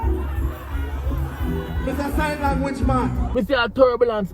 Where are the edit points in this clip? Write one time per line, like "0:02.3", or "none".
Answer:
0:03.2

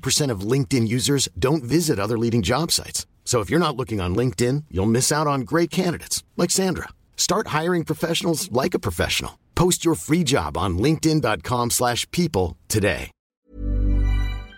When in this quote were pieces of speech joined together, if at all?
0:13.3

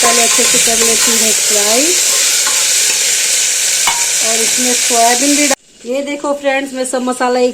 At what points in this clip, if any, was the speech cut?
0:05.5

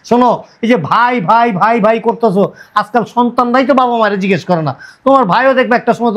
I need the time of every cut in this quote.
none

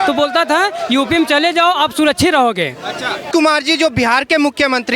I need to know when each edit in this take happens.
0:03.3

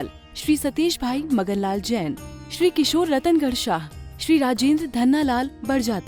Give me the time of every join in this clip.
none

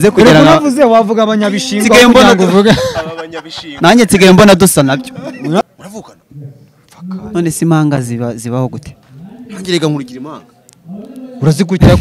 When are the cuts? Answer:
0:05.6

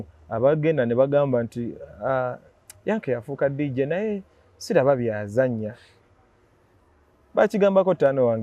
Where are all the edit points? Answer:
none

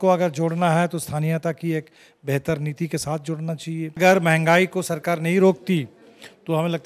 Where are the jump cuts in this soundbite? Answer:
0:04.0

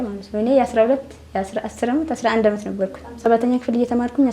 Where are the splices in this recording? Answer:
0:03.2

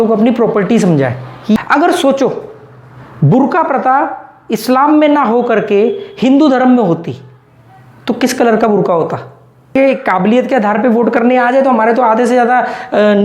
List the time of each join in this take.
0:09.8

